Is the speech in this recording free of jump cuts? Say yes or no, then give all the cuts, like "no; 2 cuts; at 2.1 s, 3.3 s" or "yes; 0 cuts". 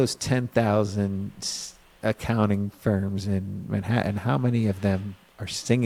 yes; 0 cuts